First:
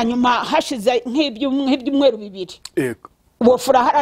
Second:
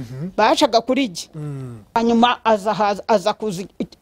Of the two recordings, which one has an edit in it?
second; 1 cut; at 2.0 s

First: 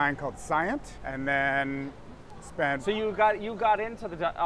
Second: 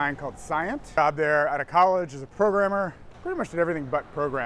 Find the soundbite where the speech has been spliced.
second; 2 cuts; at 1.0 s, 3.1 s

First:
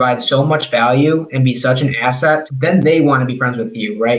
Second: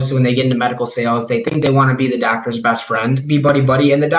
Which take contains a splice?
second; 1 cut; at 3.2 s

